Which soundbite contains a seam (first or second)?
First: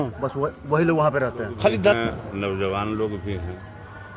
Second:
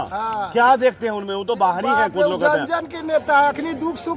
first